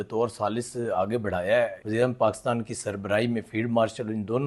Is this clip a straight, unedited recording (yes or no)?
no